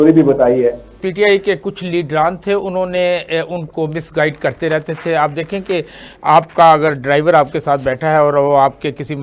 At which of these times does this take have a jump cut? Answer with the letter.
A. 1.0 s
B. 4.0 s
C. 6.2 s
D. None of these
A